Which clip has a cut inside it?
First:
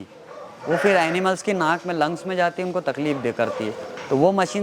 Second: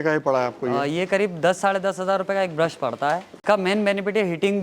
second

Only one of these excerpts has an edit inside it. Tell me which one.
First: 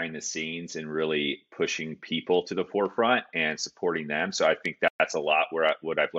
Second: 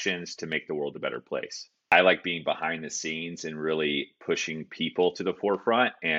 second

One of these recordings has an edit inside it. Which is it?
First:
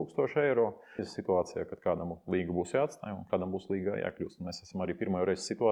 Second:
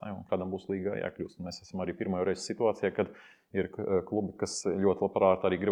first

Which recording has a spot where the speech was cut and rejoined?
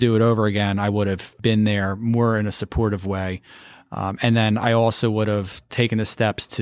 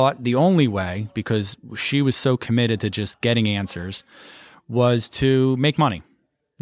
first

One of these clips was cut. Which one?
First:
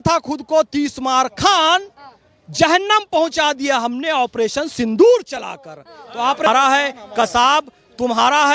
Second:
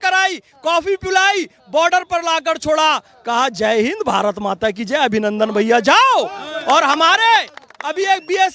first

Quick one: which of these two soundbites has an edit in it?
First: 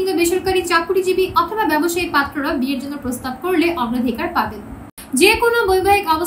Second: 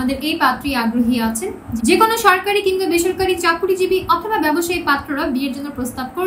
first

